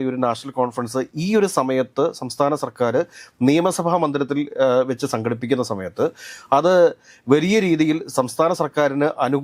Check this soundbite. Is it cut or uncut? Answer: uncut